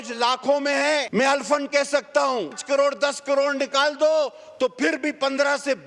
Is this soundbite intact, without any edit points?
no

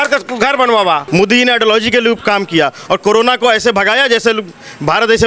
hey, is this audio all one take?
no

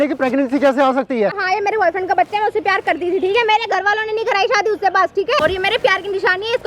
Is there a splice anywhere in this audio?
yes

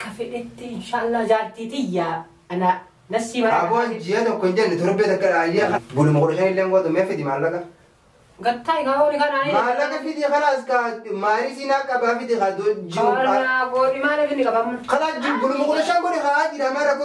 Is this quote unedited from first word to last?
yes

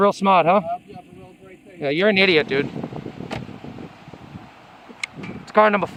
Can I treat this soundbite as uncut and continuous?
yes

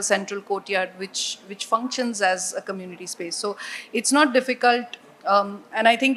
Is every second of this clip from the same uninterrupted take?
yes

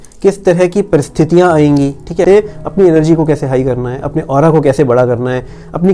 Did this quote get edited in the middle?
yes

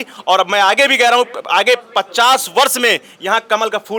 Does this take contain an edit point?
no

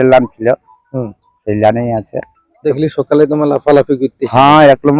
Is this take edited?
yes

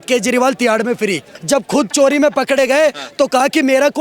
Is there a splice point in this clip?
yes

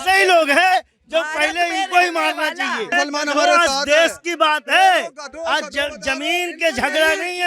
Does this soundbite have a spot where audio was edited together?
yes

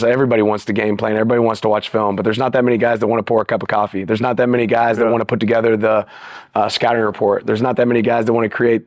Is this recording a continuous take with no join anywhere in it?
yes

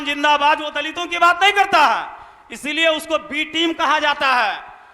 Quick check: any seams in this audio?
no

